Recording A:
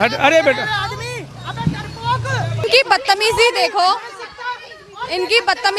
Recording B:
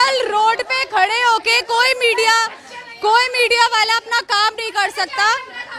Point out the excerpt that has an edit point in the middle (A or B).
A